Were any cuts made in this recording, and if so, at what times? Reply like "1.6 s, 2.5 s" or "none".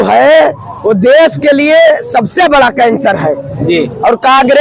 none